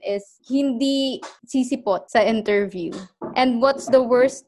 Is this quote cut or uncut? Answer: uncut